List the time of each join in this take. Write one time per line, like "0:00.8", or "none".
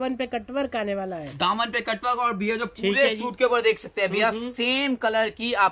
none